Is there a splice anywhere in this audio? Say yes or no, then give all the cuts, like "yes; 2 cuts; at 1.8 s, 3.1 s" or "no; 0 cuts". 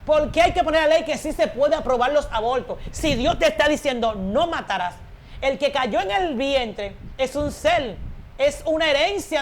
no; 0 cuts